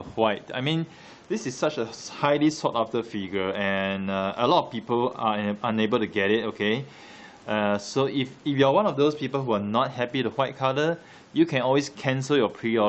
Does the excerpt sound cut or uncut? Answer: cut